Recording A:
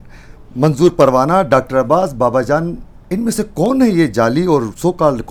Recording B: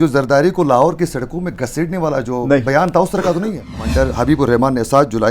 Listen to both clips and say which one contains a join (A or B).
B